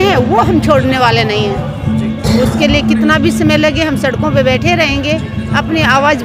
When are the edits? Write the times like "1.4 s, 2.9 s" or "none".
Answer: none